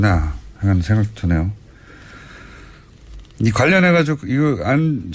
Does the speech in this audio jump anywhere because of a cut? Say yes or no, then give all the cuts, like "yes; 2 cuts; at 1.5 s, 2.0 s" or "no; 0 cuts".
yes; 1 cut; at 3.6 s